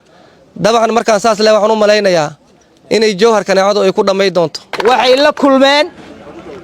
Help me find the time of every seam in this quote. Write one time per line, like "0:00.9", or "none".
0:04.7

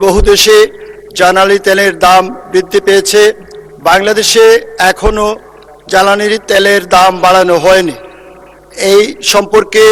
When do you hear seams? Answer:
none

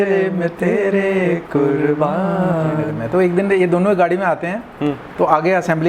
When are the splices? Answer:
0:02.9

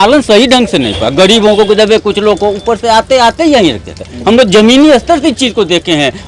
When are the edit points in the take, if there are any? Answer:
none

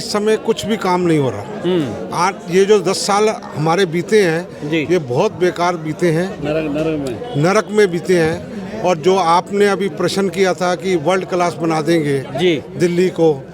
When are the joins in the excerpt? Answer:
none

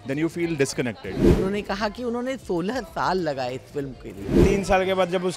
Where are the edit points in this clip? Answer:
0:01.2
0:04.4

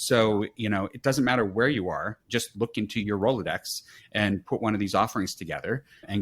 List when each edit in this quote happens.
0:02.2

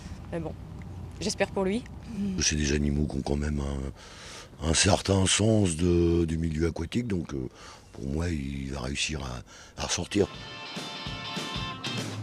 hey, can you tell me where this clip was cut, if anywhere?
none

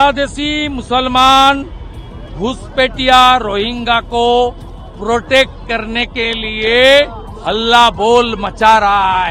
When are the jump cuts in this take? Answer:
none

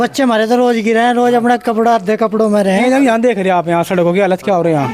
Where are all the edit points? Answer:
0:02.8

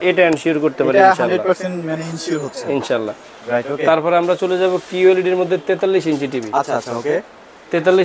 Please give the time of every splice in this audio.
none

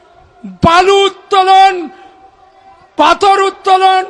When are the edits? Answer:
none

